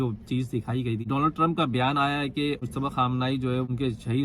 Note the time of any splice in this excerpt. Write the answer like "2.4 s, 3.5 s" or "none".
1.1 s, 2.6 s